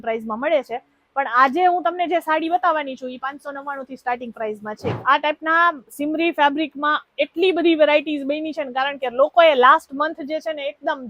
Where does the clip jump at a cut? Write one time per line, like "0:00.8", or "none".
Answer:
0:05.0